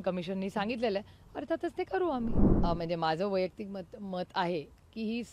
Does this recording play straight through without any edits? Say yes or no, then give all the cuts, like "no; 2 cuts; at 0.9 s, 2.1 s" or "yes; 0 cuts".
no; 1 cut; at 2.5 s